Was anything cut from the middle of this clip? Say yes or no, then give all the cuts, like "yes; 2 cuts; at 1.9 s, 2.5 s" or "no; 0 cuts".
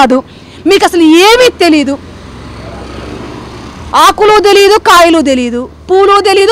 no; 0 cuts